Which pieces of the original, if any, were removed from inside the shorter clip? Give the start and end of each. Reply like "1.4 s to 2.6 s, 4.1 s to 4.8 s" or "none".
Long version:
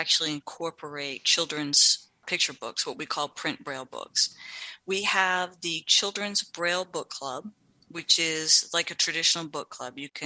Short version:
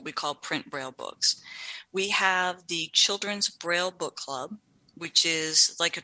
none